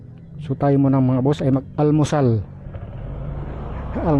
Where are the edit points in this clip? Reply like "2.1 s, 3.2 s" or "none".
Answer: 1.7 s